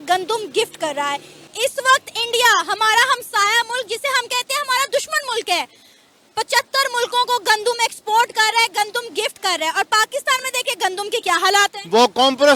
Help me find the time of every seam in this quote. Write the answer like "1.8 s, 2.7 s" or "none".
none

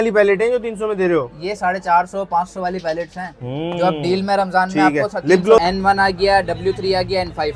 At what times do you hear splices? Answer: 5.6 s

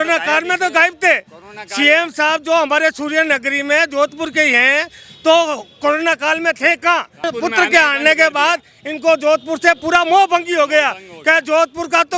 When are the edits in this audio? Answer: 7.2 s

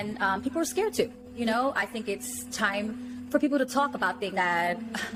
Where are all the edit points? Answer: none

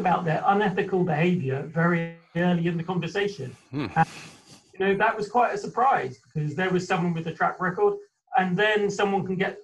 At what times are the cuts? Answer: none

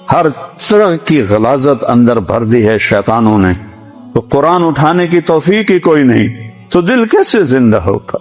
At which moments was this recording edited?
none

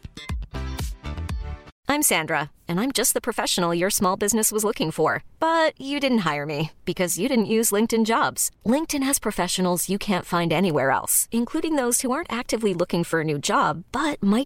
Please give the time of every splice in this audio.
1.7 s

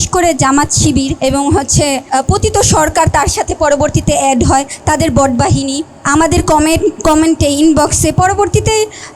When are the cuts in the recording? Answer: 1.1 s, 2.1 s, 5.9 s

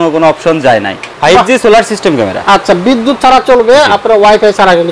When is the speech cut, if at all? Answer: 1.1 s

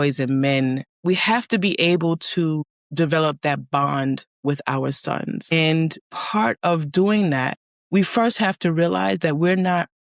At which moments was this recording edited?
0.9 s

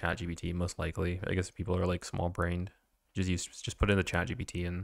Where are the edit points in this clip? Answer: none

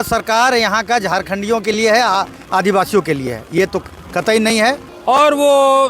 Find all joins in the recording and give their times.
4.9 s

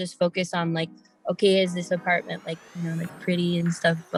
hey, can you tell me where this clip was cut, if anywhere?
none

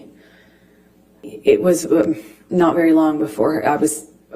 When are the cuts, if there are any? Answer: 1.2 s

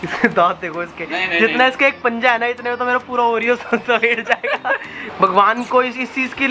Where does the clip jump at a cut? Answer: 5.0 s

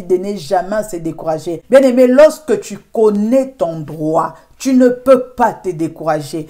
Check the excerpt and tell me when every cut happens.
1.5 s

